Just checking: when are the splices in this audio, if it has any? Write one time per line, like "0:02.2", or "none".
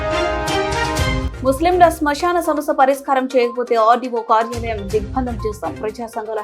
0:01.2